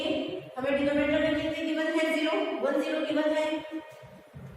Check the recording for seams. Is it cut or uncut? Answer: uncut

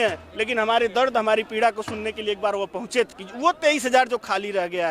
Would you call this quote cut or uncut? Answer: cut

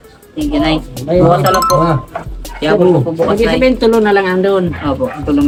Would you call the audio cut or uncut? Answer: uncut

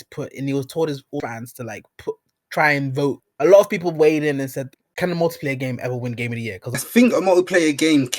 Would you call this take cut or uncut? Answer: cut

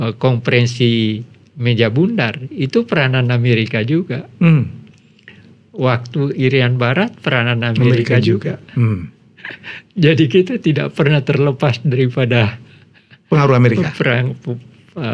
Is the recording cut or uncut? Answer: uncut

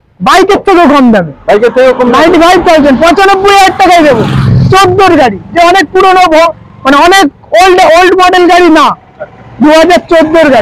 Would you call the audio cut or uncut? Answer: uncut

